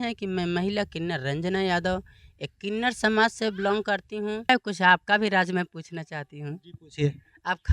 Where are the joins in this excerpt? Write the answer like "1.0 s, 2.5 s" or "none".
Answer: 4.5 s